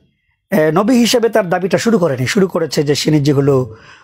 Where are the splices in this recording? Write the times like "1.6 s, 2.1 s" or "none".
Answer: none